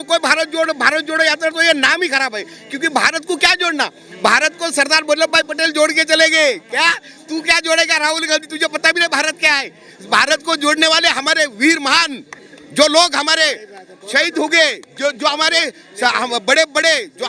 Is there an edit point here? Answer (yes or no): no